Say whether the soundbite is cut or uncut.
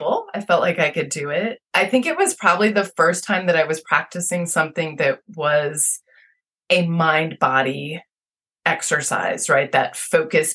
uncut